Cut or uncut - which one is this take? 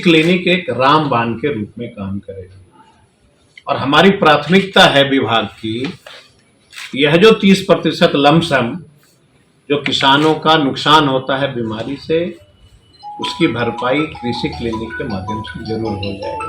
uncut